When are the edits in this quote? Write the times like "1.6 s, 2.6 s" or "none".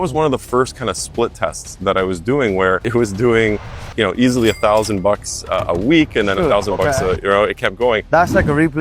2.8 s